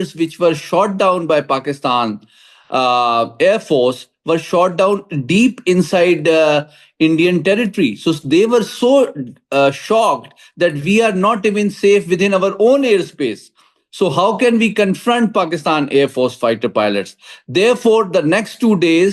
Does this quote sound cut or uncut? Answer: uncut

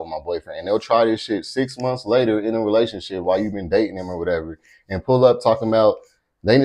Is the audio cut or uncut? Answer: uncut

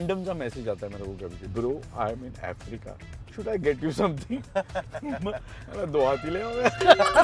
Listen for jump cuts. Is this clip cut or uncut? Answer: cut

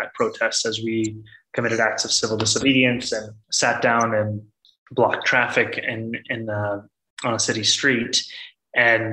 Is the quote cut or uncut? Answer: uncut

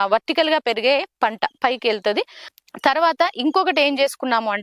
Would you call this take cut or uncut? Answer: cut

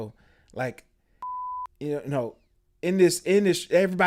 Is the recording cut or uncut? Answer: uncut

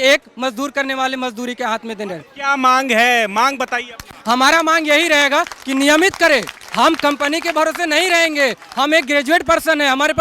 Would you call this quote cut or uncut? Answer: uncut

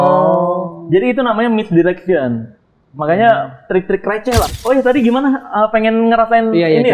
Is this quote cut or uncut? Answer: cut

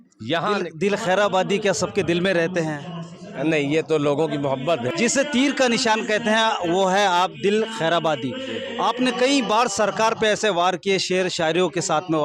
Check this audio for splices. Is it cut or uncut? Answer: cut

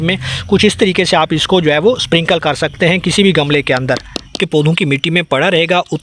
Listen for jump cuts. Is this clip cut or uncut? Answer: cut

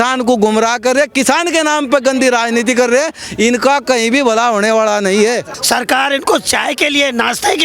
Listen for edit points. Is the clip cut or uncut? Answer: cut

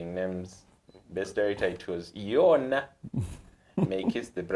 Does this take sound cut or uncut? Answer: uncut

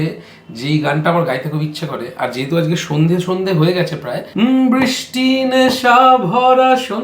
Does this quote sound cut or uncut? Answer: cut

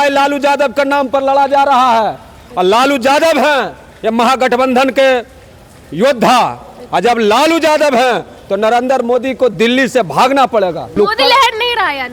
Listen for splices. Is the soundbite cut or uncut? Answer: cut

